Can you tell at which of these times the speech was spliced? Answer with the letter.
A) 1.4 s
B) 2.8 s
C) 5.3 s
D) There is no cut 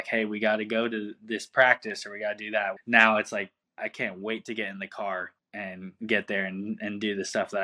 B